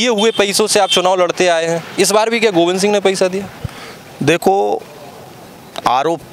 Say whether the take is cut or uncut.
uncut